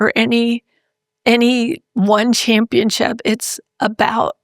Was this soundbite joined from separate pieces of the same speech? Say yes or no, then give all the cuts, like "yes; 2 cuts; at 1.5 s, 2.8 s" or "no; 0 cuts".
no; 0 cuts